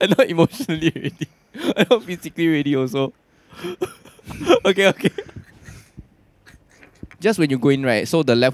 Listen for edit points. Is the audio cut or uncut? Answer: cut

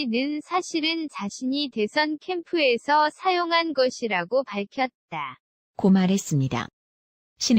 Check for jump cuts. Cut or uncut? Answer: cut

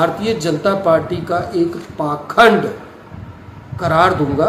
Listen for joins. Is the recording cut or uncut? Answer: uncut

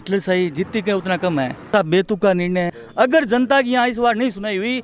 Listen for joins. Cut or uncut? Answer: cut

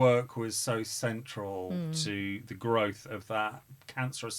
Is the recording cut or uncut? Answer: uncut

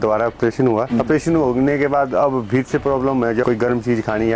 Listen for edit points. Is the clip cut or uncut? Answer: cut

